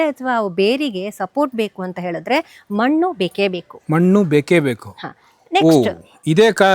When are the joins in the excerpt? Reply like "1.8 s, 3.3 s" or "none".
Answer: none